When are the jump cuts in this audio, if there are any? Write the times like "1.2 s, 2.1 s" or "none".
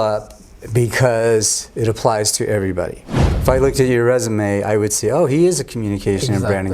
3.3 s